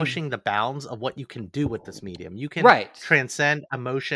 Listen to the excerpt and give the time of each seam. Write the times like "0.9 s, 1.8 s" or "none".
none